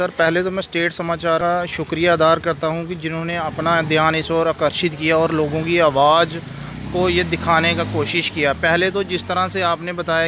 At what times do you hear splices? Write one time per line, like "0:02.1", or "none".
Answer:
0:01.4

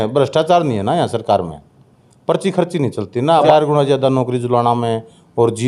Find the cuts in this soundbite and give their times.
0:03.3

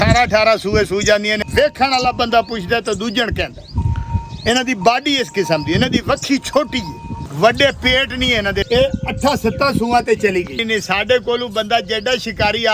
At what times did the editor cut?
0:01.4
0:07.2
0:08.6
0:10.6

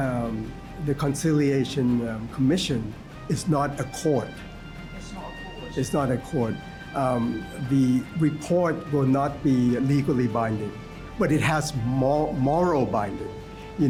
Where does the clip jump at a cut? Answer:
none

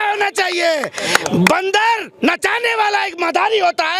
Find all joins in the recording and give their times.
none

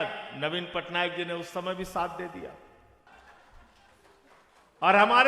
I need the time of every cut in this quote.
0:03.1

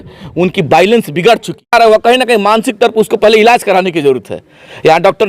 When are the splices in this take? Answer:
0:01.7

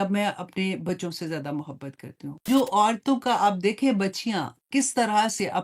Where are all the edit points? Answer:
0:02.4

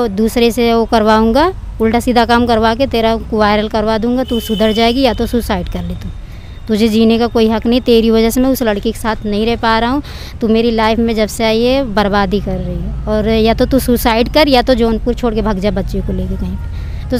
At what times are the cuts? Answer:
none

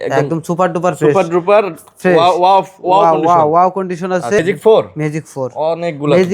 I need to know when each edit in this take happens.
0:04.4

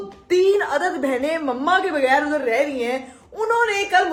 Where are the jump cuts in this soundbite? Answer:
none

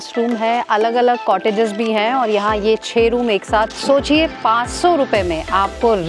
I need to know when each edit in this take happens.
0:03.7

